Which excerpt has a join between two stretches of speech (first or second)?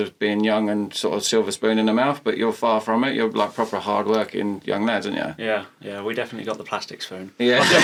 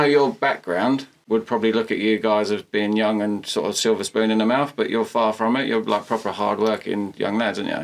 second